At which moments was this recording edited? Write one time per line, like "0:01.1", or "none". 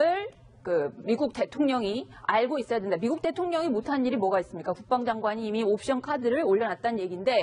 0:06.4